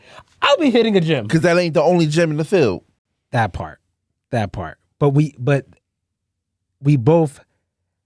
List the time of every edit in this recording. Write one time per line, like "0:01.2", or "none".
none